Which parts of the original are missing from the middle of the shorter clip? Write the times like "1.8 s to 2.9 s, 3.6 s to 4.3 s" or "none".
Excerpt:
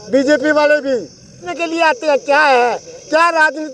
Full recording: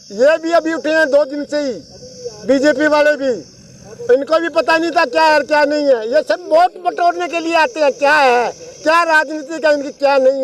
3.9 s to 7.3 s